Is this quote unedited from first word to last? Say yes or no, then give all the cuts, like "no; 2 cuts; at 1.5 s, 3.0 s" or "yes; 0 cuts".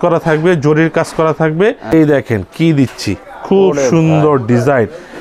no; 1 cut; at 1.9 s